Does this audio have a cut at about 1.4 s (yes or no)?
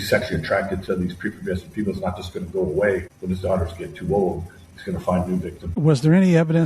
no